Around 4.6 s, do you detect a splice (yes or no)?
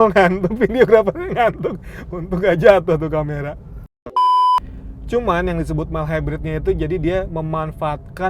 yes